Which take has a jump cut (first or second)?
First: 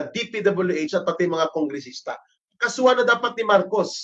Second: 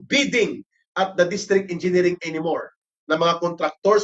second